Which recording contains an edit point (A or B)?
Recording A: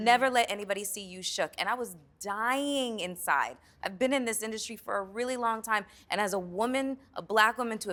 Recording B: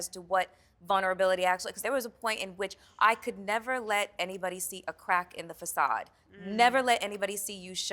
B